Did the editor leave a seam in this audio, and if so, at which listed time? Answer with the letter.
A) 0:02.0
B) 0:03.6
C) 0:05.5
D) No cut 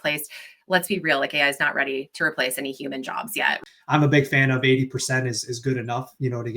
B